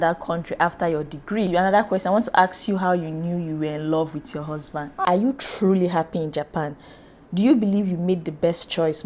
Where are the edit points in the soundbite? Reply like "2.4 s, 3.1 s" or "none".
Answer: 1.5 s, 5.0 s